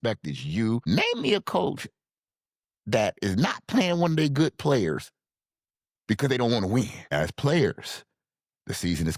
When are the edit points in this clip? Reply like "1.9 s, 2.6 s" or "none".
0.8 s, 7.0 s